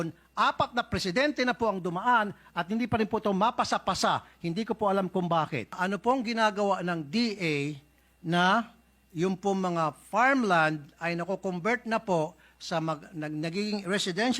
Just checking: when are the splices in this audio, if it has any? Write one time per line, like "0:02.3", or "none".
0:05.8